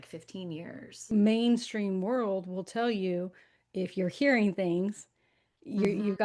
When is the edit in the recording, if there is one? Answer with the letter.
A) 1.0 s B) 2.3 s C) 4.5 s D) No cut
A